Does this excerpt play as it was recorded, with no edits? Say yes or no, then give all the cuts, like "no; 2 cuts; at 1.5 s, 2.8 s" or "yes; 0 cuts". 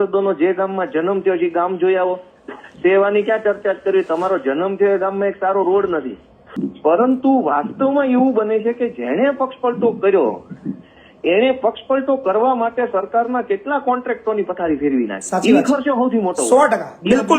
no; 1 cut; at 6.5 s